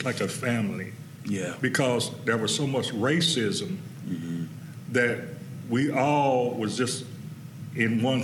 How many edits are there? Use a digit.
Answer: 0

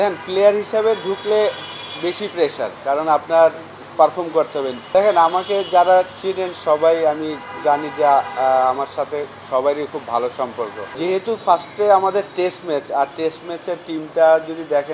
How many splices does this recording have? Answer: 2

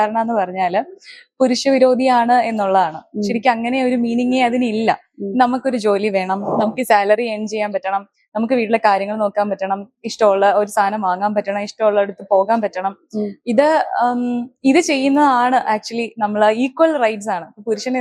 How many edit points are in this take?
0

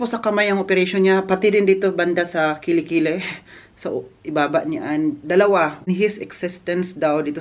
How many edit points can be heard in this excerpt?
1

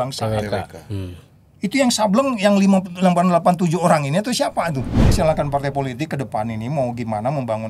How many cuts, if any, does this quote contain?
1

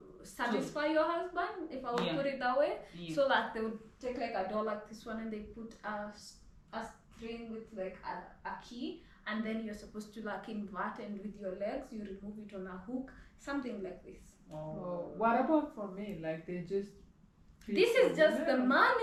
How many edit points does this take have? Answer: 0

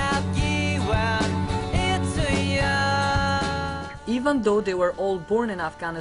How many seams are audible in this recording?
1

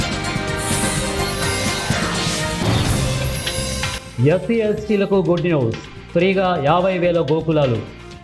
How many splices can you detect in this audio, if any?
1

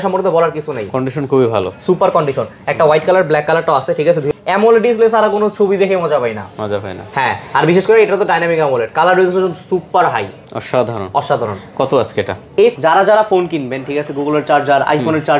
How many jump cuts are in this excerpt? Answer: 2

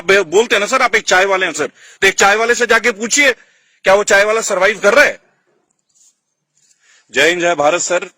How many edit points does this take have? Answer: 0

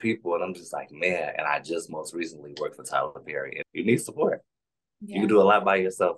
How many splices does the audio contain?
1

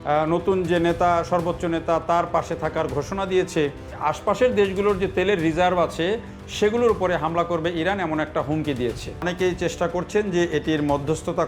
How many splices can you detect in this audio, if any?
2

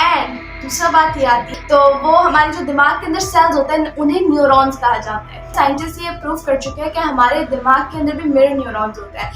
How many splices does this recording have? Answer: 2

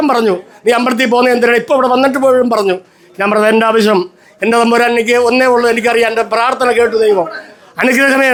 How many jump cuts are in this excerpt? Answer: 0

